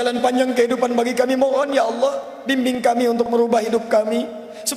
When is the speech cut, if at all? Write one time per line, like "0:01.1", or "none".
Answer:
none